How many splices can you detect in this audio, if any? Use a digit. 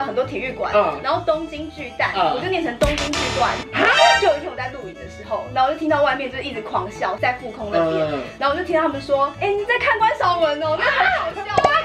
3